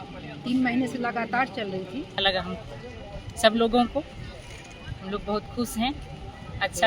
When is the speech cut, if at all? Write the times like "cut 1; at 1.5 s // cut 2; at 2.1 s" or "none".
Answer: cut 1; at 2.2 s

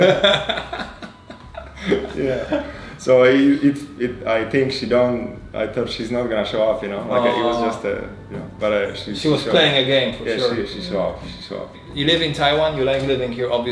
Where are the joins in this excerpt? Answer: none

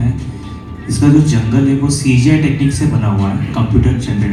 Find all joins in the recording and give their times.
none

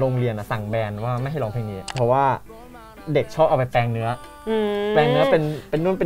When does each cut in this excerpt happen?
cut 1; at 1.8 s

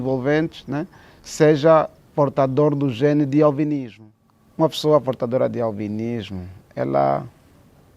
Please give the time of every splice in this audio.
cut 1; at 3.9 s

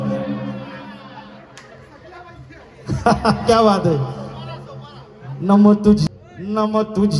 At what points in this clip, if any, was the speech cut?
cut 1; at 6.0 s

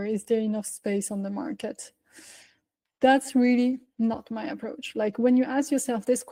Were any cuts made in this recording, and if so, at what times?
none

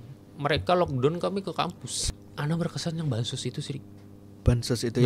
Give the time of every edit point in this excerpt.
cut 1; at 1.9 s

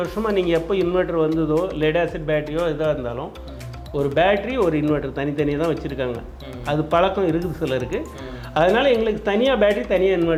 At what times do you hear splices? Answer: none

